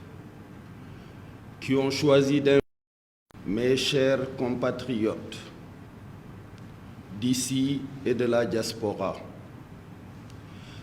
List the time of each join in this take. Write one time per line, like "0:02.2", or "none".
0:02.6